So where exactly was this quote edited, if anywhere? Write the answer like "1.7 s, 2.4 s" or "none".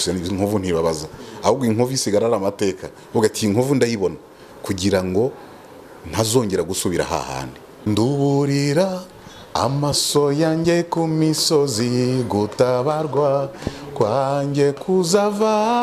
7.7 s